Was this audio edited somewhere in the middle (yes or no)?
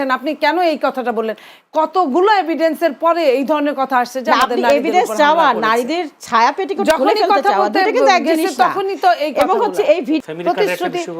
yes